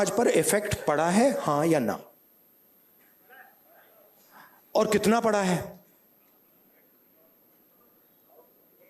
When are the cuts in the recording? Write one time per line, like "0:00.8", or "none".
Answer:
none